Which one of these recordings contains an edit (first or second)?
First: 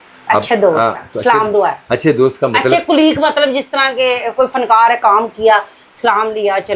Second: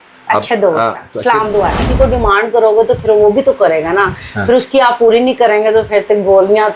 second